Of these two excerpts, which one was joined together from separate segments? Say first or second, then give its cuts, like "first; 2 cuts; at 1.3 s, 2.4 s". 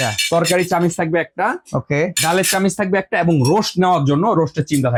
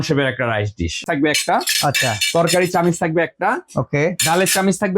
second; 1 cut; at 1.0 s